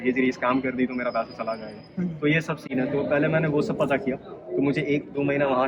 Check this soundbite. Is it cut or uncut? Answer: uncut